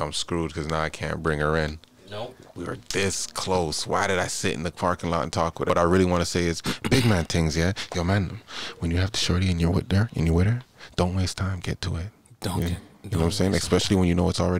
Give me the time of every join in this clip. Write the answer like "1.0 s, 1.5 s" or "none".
2.5 s, 5.7 s